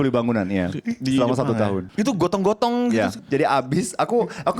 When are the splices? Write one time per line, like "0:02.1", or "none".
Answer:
0:01.8
0:03.2